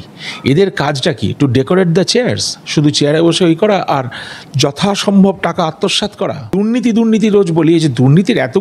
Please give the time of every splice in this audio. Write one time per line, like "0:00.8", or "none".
0:06.5